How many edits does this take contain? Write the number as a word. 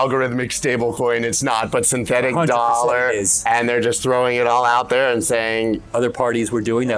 one